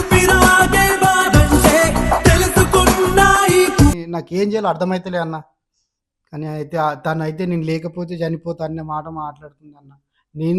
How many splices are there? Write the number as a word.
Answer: one